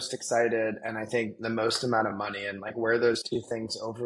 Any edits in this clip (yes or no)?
no